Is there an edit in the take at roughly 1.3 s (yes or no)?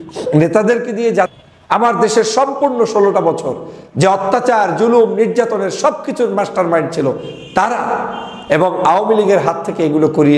yes